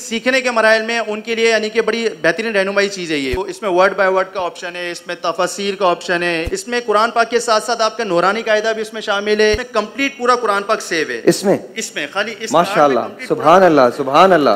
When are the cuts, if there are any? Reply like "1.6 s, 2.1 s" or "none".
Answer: 3.3 s, 6.5 s, 9.6 s